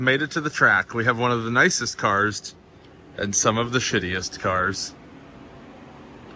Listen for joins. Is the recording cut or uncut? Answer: uncut